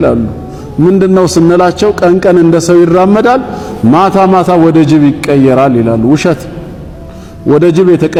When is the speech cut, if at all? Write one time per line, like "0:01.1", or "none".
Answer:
none